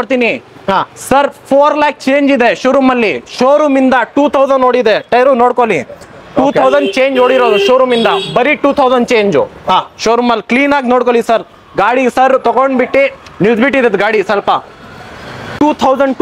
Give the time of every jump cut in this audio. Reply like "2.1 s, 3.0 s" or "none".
none